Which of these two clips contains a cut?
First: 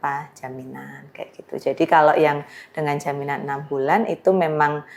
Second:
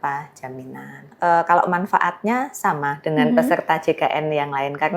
second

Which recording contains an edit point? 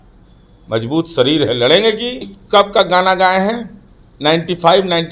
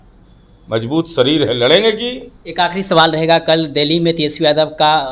first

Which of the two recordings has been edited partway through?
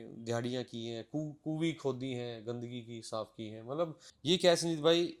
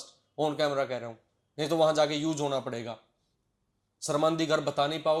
first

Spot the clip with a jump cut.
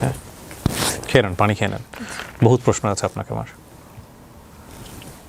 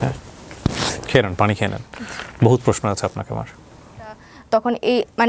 second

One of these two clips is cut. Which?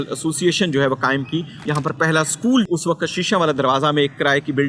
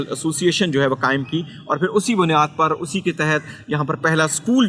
first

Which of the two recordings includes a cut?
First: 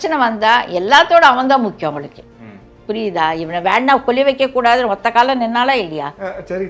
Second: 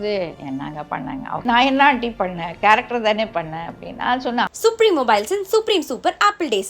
second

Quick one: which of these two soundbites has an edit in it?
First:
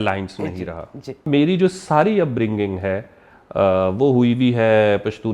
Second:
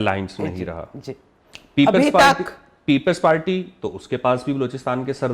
first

